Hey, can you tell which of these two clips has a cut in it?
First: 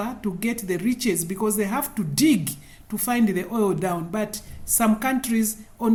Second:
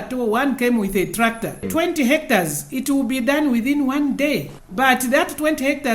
second; 2 cuts; at 1.7 s, 4.6 s

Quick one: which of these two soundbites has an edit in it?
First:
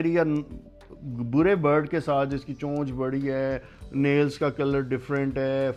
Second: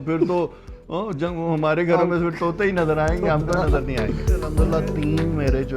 second; 1 cut; at 4.5 s

